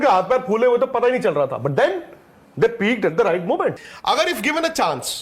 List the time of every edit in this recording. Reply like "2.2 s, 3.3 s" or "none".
3.9 s